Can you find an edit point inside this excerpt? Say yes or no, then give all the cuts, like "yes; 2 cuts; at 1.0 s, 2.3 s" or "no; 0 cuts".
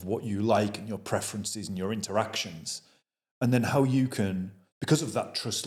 no; 0 cuts